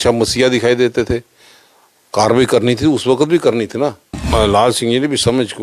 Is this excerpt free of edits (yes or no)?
no